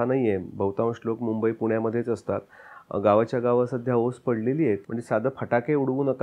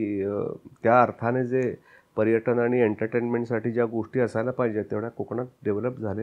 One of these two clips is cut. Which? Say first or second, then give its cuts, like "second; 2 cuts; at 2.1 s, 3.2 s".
first; 1 cut; at 4.9 s